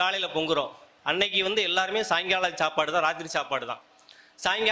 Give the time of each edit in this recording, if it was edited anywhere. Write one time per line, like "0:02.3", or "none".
none